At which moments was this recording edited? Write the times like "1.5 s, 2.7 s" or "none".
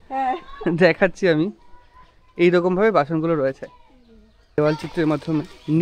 4.6 s